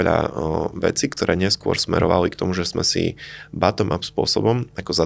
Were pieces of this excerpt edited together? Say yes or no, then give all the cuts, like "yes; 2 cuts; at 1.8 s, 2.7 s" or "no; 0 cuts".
no; 0 cuts